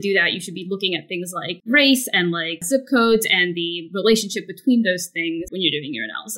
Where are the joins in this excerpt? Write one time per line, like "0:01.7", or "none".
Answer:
0:01.6
0:02.5
0:05.5